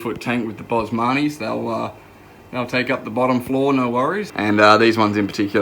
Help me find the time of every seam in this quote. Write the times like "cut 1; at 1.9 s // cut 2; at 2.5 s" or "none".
cut 1; at 4.3 s